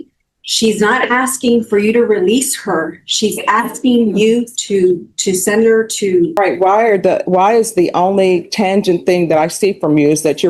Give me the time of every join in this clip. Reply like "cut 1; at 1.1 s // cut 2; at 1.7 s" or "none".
cut 1; at 6.4 s